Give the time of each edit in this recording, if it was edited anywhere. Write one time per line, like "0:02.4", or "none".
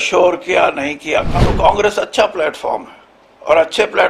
0:01.2